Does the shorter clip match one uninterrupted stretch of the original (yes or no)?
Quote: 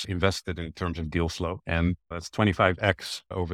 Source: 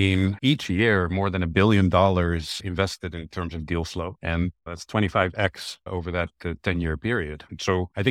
yes